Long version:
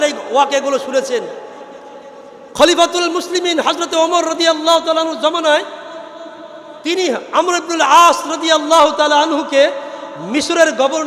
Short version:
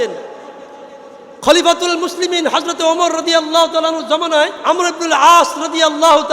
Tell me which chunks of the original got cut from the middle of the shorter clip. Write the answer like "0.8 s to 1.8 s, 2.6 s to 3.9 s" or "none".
5.7 s to 7.3 s